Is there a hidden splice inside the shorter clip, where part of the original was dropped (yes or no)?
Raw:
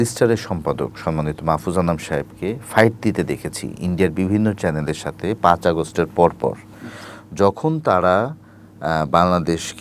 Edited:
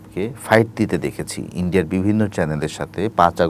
no